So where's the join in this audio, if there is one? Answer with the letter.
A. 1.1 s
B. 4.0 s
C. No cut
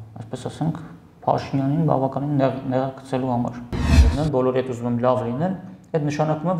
B